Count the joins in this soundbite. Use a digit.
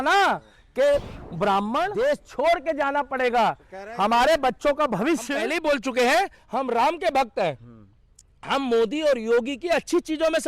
2